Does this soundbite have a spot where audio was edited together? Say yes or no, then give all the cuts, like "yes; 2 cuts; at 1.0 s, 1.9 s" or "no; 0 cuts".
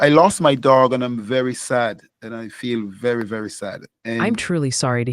yes; 1 cut; at 3.9 s